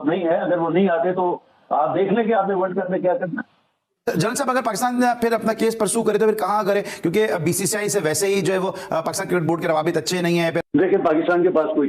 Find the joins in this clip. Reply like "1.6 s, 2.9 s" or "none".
3.8 s, 10.6 s